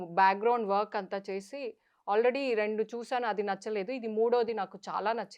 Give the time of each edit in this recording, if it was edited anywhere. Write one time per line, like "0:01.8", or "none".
none